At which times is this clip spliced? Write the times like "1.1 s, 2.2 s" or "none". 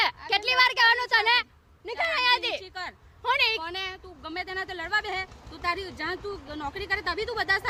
none